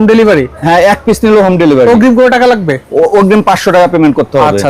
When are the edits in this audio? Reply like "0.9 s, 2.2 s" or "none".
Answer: none